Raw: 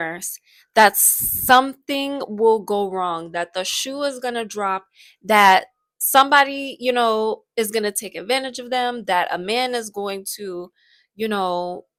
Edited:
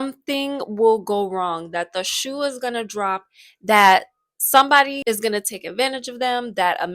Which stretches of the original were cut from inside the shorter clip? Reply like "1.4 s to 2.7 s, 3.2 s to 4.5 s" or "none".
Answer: 6.6 s to 7.5 s